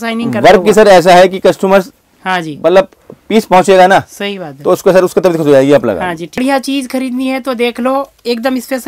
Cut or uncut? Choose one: cut